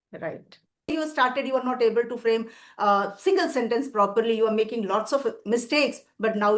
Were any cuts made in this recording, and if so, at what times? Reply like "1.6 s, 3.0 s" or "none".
0.9 s